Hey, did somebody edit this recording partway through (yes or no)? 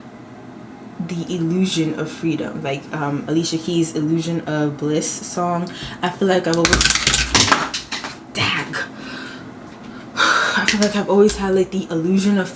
no